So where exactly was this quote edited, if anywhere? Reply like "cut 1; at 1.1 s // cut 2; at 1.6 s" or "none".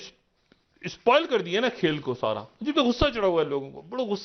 none